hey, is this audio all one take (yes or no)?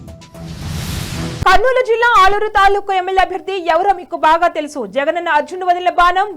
no